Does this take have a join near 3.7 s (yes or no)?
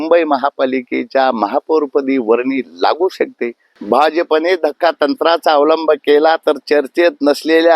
yes